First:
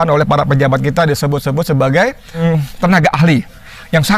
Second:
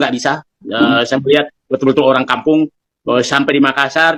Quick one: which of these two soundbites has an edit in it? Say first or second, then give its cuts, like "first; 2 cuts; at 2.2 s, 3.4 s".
first; 1 cut; at 2.4 s